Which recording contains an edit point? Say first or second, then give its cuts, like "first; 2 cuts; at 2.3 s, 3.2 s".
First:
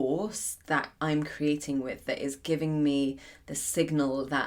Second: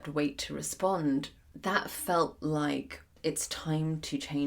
second; 2 cuts; at 1.4 s, 3.1 s